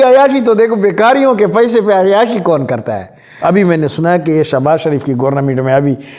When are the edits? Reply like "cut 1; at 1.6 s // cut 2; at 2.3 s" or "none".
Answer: cut 1; at 3.2 s